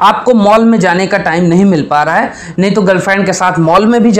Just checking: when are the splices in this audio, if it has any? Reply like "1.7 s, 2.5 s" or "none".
none